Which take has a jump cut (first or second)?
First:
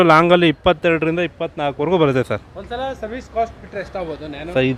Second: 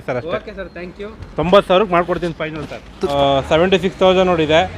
second